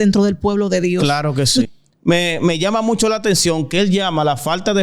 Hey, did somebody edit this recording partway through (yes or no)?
yes